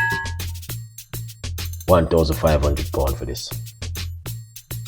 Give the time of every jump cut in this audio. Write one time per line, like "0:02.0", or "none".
0:03.7

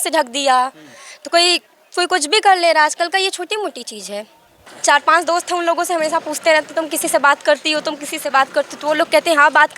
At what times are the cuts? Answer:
0:04.7

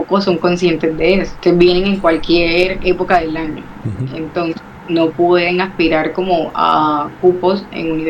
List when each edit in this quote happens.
0:01.3

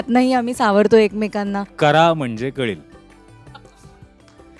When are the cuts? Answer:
0:01.6

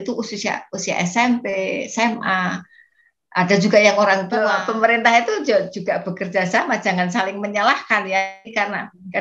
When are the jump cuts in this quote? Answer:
0:04.5

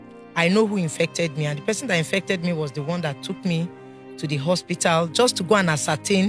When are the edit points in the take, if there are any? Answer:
none

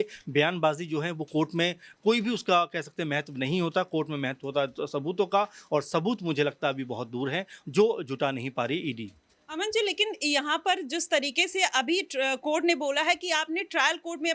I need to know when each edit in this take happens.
none

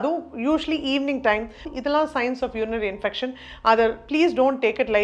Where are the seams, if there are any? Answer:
0:01.7

